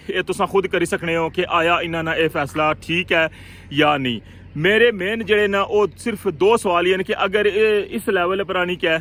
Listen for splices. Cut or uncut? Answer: uncut